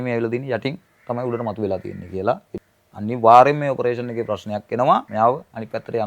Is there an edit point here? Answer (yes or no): yes